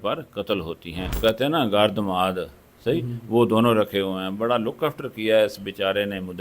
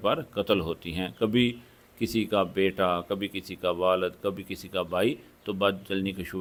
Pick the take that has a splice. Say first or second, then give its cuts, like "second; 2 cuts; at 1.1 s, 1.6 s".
first; 1 cut; at 1.2 s